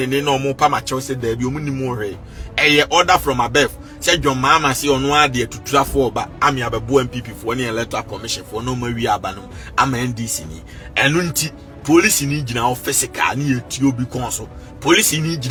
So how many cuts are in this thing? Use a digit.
0